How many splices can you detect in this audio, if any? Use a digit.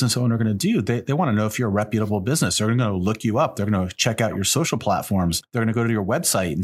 1